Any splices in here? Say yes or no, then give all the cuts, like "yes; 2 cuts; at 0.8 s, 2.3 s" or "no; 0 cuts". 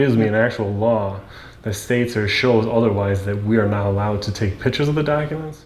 no; 0 cuts